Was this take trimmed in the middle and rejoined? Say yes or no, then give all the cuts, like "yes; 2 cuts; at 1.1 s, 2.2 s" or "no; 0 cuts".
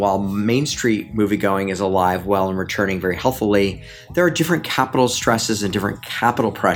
no; 0 cuts